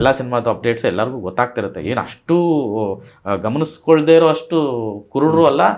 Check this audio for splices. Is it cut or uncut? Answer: uncut